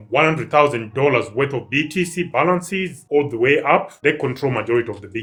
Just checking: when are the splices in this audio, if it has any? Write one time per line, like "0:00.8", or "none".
none